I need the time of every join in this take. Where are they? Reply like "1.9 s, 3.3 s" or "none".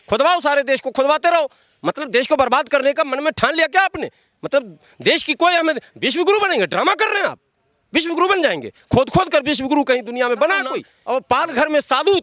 10.9 s